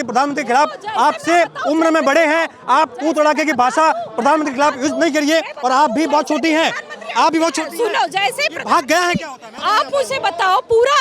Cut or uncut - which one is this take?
cut